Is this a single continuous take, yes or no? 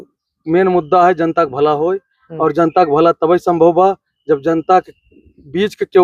yes